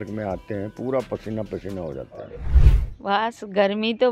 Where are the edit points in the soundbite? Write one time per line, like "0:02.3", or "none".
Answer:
0:02.4